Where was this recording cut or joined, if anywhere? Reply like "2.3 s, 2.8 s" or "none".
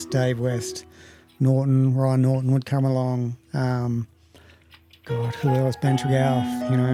none

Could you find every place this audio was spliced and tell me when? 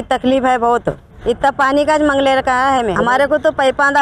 1.1 s, 2.9 s

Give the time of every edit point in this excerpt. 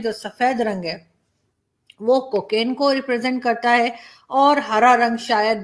none

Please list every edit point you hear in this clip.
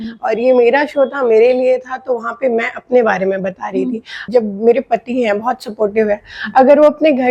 4.2 s

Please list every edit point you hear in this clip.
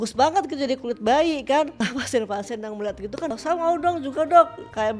1.8 s, 3.3 s

